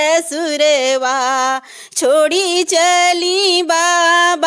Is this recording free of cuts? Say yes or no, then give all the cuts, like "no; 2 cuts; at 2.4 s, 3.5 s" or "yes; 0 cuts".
yes; 0 cuts